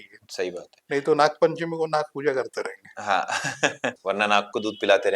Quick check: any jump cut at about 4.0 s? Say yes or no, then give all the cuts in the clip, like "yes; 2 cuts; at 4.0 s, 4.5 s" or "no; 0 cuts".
yes; 1 cut; at 4.0 s